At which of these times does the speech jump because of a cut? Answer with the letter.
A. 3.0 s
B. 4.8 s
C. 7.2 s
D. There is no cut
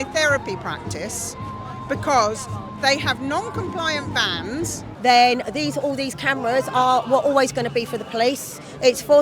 B